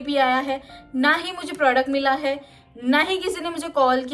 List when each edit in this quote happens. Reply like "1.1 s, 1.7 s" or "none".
none